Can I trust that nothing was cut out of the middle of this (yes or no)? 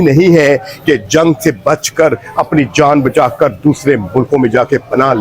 yes